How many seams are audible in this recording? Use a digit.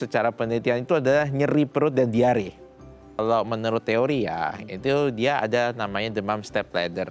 1